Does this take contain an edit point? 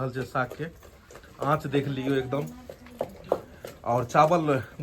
no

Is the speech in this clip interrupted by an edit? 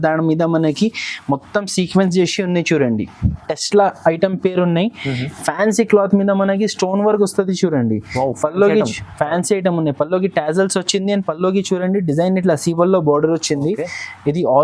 yes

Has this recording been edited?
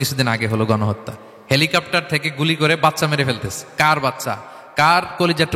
no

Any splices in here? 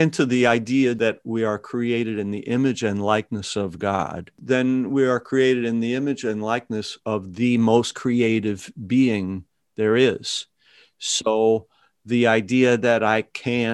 yes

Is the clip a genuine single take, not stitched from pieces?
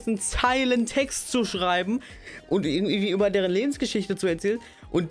yes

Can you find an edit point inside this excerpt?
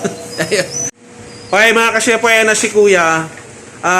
yes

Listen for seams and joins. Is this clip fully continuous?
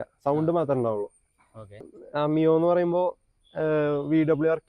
no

